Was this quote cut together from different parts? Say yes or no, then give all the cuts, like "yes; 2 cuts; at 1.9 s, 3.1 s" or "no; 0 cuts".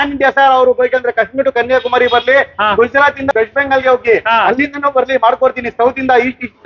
no; 0 cuts